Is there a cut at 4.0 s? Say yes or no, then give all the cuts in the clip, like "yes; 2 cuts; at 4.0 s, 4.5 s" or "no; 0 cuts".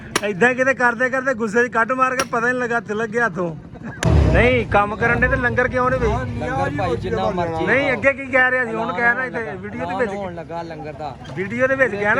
yes; 1 cut; at 4.0 s